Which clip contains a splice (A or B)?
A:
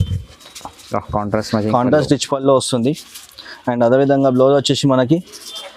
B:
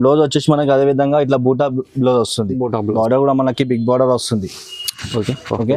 B